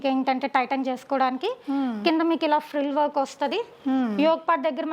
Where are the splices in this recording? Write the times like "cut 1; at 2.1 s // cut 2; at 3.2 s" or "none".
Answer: none